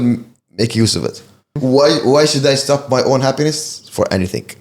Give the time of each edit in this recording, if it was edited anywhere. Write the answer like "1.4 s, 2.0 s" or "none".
1.4 s